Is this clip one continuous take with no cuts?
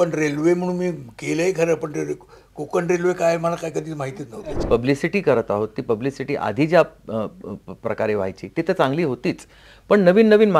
no; 1 cut; at 4.5 s

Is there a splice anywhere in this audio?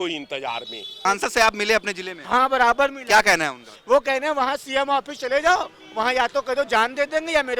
yes; 1 cut; at 1.0 s

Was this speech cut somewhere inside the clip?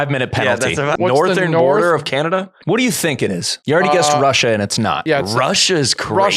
yes; 4 cuts; at 0.9 s, 2.5 s, 3.5 s, 5.0 s

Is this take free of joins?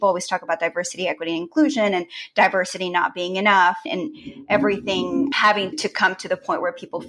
yes; 0 cuts

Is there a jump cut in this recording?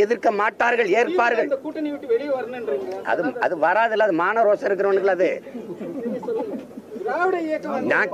no; 0 cuts

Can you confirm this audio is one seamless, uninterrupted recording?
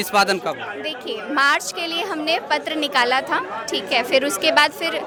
yes; 0 cuts

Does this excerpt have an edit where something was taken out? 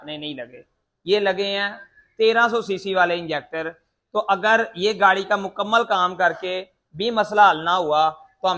no; 0 cuts

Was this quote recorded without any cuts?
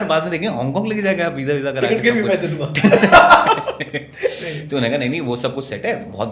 yes; 0 cuts

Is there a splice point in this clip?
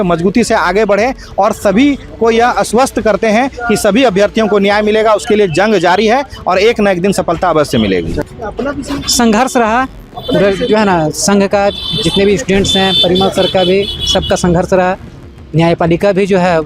yes; 1 cut; at 8.2 s

